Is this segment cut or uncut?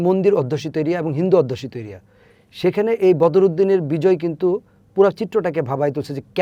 uncut